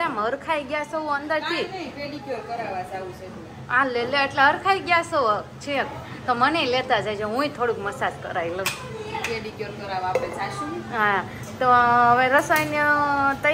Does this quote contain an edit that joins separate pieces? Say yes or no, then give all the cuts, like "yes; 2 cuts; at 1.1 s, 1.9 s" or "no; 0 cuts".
no; 0 cuts